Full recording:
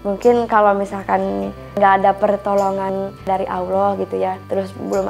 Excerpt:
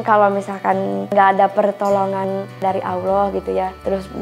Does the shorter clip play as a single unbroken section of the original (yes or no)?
no